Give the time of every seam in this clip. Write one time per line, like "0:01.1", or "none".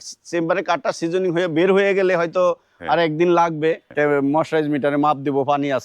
0:03.9